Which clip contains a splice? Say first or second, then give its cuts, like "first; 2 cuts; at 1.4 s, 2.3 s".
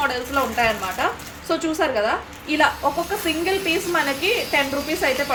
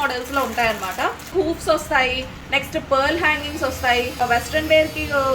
second; 2 cuts; at 1.3 s, 4.2 s